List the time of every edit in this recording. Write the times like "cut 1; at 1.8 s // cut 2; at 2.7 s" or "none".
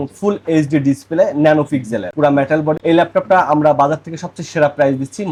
none

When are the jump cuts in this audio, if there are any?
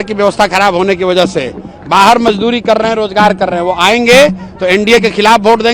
none

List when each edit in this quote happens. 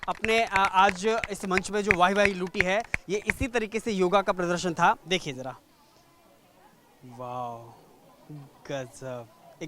cut 1; at 5.0 s

